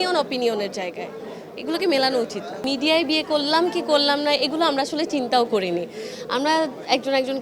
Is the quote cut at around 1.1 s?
no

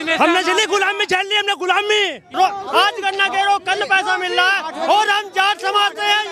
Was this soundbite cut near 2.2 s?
yes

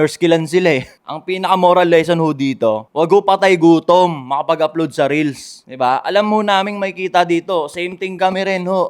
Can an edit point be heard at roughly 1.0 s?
yes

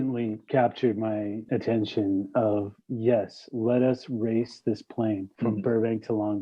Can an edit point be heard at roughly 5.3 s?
yes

